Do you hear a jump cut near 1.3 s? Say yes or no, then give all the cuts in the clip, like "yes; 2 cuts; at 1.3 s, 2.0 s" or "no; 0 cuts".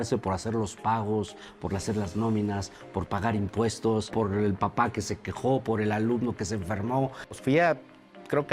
no; 2 cuts; at 4.1 s, 7.4 s